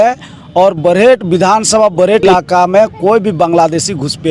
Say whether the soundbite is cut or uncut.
cut